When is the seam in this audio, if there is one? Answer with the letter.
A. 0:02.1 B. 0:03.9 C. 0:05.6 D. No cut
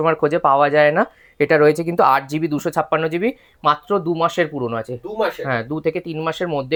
D